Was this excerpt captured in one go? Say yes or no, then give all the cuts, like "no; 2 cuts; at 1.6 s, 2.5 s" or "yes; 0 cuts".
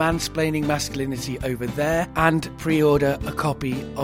no; 1 cut; at 2.3 s